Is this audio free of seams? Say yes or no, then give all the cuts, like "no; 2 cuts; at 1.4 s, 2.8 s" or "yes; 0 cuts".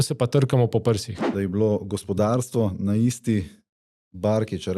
no; 1 cut; at 1.2 s